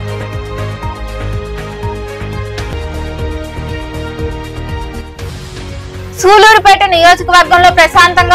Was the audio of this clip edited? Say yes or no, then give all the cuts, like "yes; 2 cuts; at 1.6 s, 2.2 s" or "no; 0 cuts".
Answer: no; 0 cuts